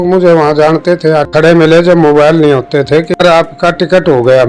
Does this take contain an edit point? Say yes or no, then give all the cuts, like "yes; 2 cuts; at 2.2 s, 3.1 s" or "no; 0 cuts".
yes; 2 cuts; at 1.3 s, 3.2 s